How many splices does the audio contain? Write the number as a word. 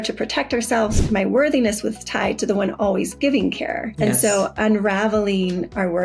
two